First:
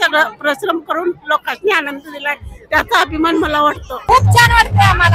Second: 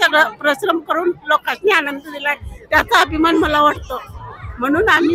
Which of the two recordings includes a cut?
first; 1 cut; at 3.9 s

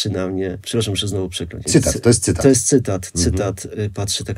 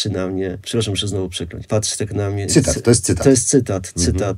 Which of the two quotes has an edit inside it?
first; 1 cut; at 1.6 s

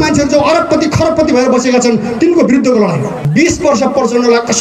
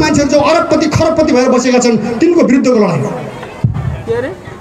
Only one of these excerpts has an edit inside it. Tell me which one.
first; 1 cut; at 3.2 s

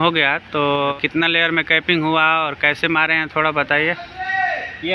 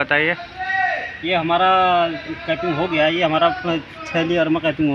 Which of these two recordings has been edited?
first; 1 cut; at 0.9 s

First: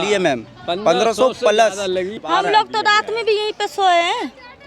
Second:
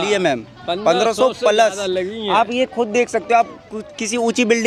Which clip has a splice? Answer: first; 1 cut; at 2.2 s

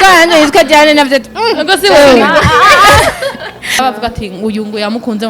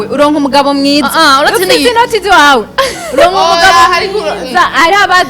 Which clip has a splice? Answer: first; 1 cut; at 3.8 s

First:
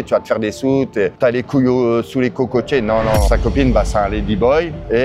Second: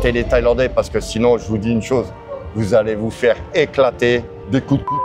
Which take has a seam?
first; 2 cuts; at 1.1 s, 3.2 s

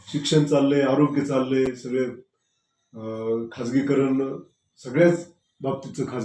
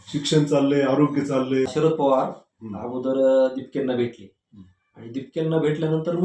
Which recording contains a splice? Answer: second; 1 cut; at 1.7 s

